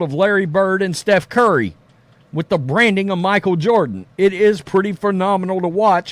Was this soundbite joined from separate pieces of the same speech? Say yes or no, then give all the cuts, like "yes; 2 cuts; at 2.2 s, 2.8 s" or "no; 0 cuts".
no; 0 cuts